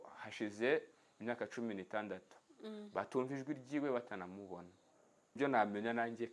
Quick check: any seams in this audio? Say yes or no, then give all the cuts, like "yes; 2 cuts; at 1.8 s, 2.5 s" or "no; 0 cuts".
yes; 1 cut; at 5.4 s